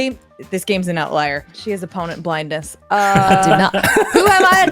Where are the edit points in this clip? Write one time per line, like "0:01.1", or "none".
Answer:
0:01.5